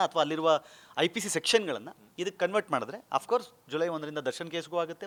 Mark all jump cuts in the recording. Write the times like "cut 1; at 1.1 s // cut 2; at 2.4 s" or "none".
none